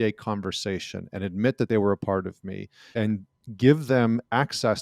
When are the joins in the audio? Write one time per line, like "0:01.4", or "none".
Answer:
0:01.7